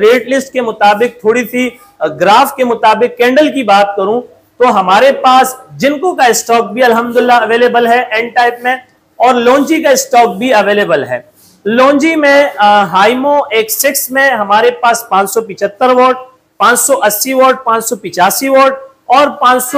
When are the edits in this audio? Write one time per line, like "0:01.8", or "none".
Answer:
none